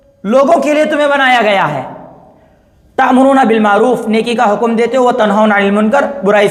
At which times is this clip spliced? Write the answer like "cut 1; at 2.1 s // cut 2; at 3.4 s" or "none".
none